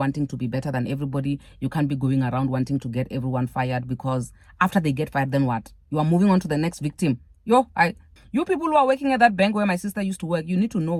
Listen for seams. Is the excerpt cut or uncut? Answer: uncut